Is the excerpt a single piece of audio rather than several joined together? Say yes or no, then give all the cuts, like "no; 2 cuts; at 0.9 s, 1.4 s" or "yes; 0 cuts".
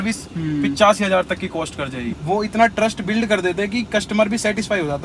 no; 1 cut; at 2.0 s